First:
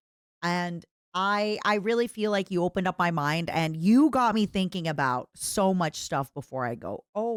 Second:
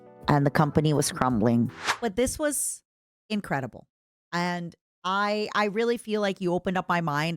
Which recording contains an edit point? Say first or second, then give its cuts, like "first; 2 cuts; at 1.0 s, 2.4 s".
second; 1 cut; at 1.8 s